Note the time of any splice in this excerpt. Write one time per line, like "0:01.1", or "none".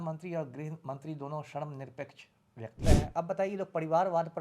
0:02.8